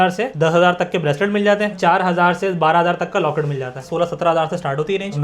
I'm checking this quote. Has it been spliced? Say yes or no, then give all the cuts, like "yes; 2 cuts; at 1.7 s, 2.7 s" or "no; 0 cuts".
yes; 2 cuts; at 1.8 s, 3.8 s